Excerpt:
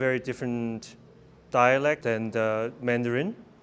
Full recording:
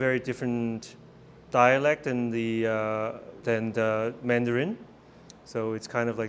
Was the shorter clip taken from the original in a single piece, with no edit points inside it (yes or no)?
no